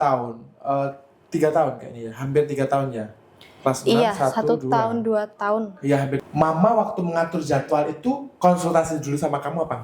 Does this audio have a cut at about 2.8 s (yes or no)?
no